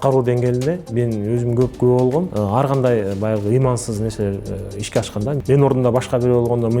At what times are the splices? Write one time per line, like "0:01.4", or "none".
0:02.3
0:05.4